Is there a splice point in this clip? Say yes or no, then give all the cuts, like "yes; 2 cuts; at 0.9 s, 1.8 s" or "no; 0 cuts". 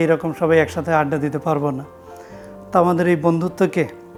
no; 0 cuts